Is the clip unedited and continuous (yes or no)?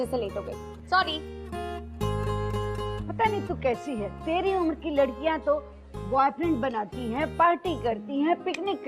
no